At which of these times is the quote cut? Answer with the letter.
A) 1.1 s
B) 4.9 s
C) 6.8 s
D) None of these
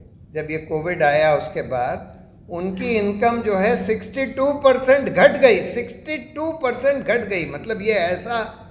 D